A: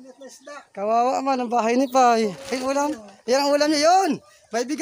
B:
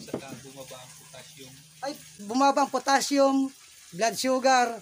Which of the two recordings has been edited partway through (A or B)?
B